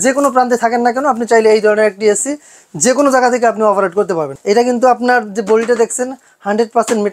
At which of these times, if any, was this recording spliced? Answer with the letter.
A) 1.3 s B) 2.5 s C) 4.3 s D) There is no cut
C